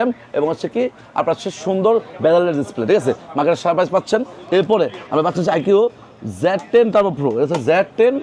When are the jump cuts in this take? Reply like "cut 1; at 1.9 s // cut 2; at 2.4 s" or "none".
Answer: none